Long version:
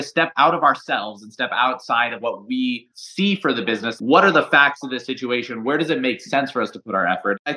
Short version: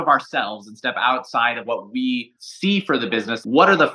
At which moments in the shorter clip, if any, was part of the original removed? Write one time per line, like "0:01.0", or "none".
none

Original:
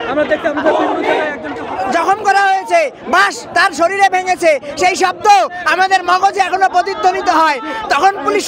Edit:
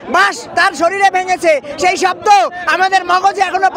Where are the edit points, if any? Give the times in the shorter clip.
none

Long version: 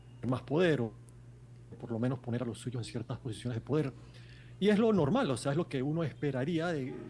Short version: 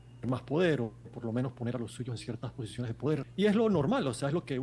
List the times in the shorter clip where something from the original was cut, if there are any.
0:01.0
0:03.3

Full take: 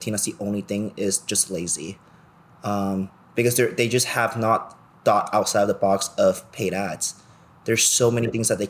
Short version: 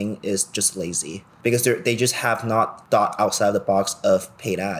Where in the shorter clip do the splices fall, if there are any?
0:01.3
0:02.8

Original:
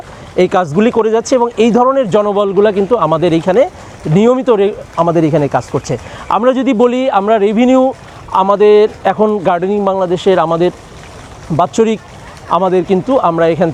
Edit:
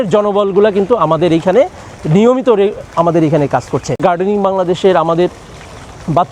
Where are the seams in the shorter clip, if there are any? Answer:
0:04.0

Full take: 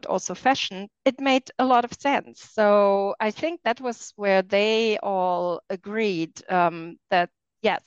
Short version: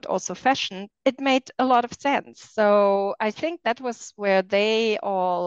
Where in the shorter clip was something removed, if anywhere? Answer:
none

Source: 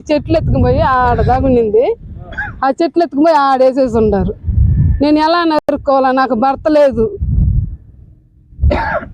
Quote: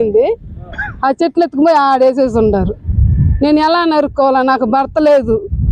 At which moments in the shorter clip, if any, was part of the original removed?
0:04.0

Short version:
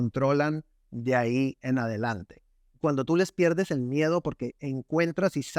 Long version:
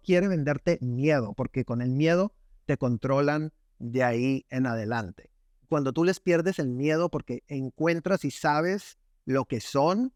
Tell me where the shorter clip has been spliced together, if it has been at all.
none

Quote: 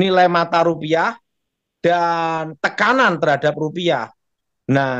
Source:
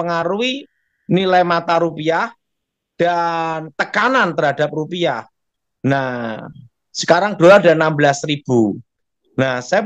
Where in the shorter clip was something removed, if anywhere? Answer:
none

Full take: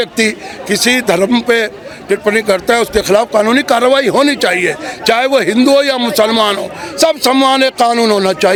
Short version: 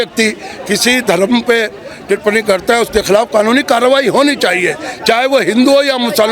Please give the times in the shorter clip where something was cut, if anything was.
none

